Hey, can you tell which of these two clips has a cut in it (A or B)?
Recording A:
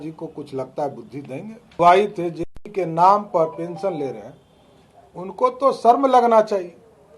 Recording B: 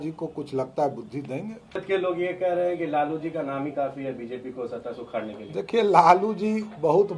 A